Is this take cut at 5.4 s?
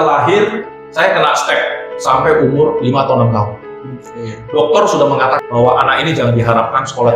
yes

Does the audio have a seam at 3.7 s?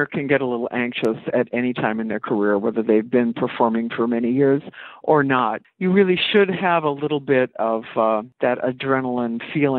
no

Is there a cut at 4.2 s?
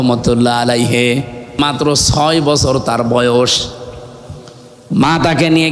no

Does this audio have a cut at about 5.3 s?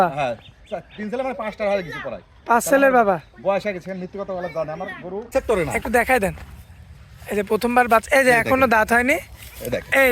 yes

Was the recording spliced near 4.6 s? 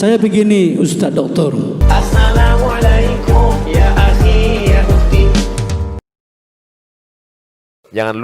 no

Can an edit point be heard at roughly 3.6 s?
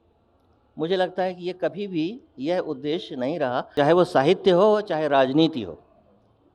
yes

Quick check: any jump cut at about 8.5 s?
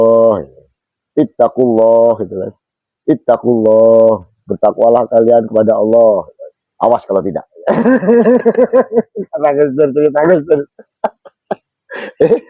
no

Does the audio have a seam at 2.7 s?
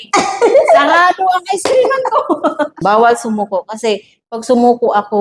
yes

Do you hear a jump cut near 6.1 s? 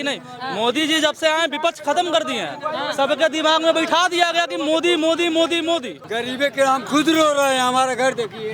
yes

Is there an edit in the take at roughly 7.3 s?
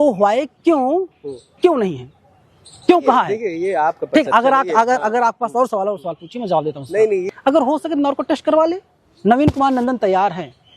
yes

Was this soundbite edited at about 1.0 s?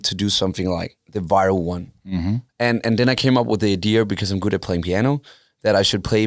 yes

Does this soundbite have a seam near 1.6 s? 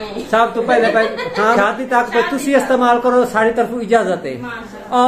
yes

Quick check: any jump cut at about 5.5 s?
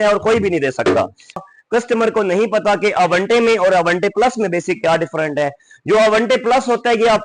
no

